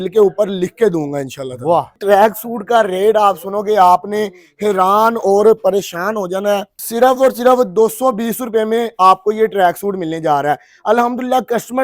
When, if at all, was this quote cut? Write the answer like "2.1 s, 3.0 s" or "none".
2.0 s, 6.8 s